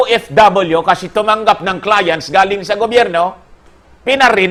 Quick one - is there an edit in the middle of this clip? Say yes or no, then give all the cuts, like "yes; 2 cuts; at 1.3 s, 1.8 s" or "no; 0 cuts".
no; 0 cuts